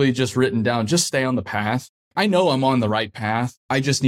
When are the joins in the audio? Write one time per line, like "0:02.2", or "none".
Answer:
0:02.0